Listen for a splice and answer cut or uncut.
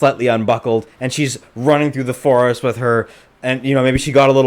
uncut